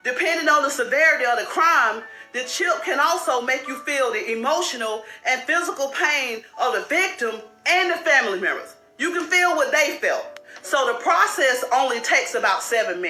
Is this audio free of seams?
yes; 0 cuts

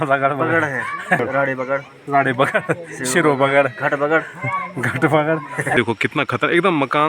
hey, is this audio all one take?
no; 2 cuts; at 1.2 s, 5.7 s

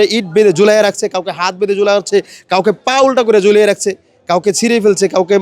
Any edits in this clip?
no; 0 cuts

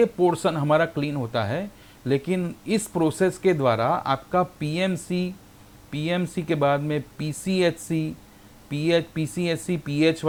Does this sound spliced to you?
no; 0 cuts

